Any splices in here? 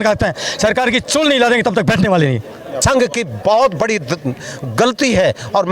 yes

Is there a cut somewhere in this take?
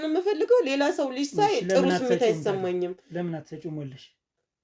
no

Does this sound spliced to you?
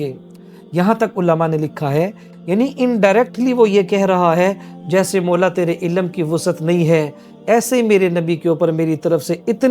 yes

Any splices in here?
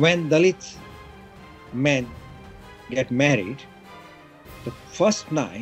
no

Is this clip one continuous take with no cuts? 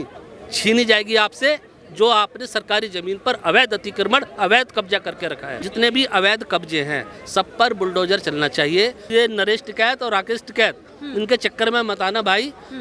no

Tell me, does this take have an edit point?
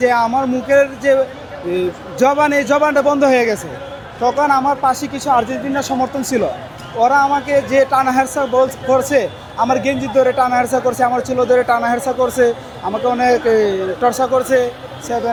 no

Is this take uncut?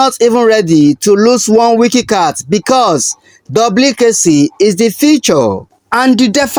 yes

